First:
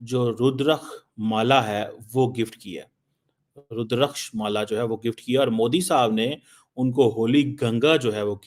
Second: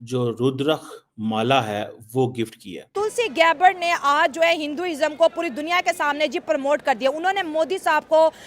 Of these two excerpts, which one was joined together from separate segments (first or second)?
second